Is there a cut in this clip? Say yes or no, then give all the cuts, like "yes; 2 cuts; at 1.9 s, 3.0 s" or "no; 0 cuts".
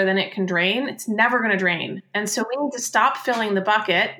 yes; 1 cut; at 2.0 s